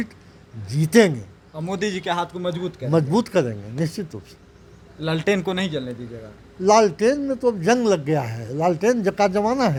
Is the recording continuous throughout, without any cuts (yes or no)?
yes